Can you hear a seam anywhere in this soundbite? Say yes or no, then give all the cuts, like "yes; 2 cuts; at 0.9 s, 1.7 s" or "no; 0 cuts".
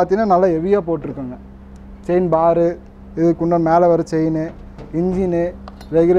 no; 0 cuts